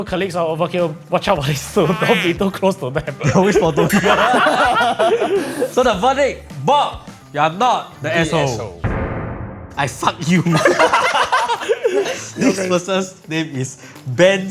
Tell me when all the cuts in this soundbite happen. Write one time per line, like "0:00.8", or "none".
none